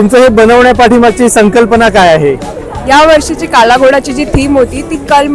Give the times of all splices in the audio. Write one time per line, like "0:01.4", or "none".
none

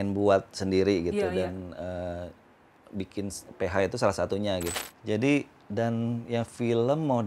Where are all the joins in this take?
0:04.8

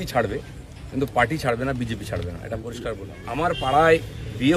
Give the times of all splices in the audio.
0:03.1

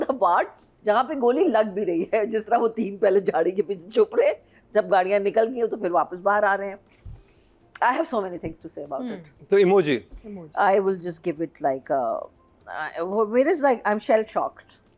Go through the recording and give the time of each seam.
none

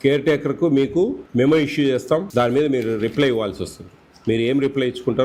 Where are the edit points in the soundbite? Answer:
0:01.2
0:02.3

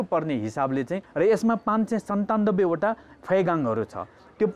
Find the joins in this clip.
0:01.0

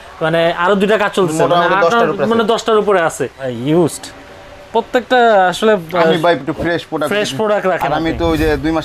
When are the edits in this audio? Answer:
0:03.5

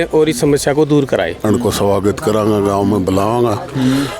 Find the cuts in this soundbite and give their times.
0:01.4

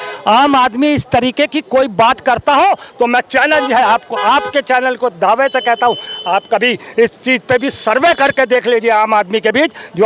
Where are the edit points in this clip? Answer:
none

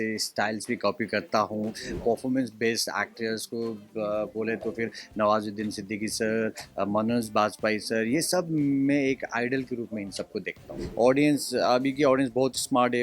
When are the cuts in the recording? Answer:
0:01.9
0:10.8

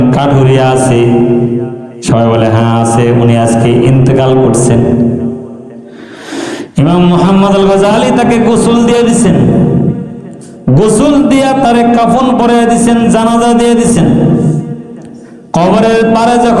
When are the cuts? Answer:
0:15.4

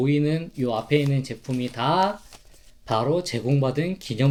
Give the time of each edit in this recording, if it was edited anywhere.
none

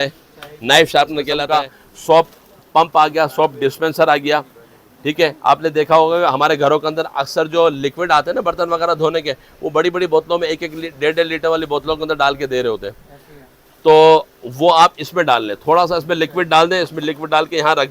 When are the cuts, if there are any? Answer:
0:01.1

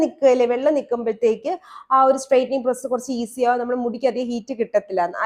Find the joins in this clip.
none

